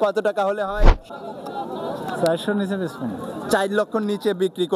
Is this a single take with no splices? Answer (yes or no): no